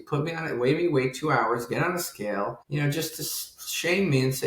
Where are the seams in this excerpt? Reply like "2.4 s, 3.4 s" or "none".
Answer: 2.6 s